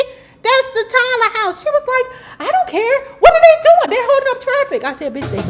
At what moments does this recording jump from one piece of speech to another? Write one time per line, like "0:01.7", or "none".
none